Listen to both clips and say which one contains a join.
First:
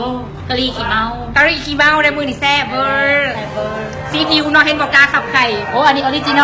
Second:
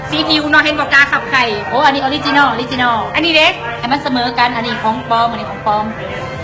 first; 1 cut; at 2.8 s

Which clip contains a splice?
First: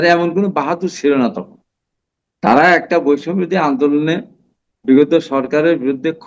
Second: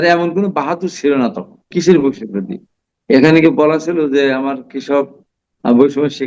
second; 1 cut; at 1.7 s

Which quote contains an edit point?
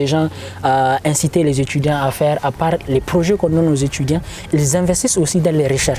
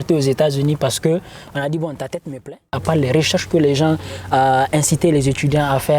second; 1 cut; at 2.8 s

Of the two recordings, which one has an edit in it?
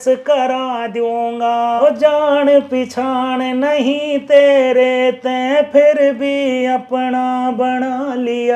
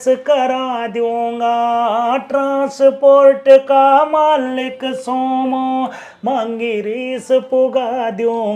first; 1 cut; at 1.8 s

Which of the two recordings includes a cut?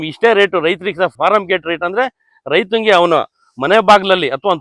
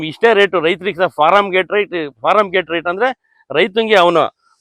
first; 1 cut; at 1.1 s

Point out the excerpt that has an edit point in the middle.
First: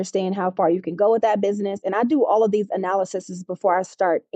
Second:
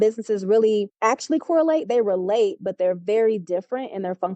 second; 1 cut; at 0.9 s

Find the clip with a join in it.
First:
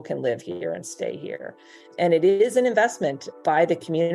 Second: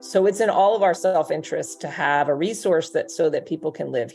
first; 1 cut; at 1.8 s

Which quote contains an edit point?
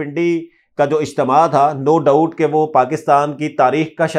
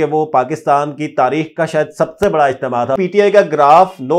second; 1 cut; at 3.0 s

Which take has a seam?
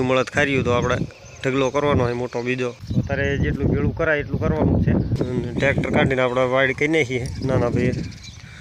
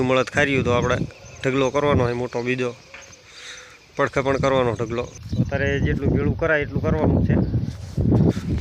first; 2 cuts; at 2.8 s, 5.1 s

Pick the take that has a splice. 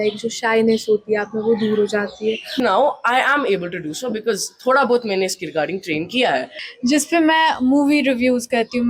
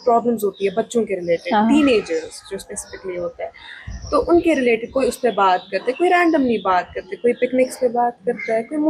first; 2 cuts; at 2.6 s, 6.5 s

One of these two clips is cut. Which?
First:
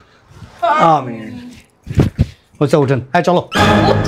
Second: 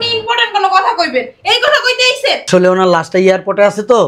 second; 1 cut; at 2.5 s

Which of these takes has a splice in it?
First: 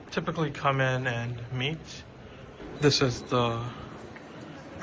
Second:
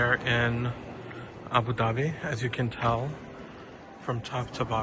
first; 1 cut; at 2.6 s

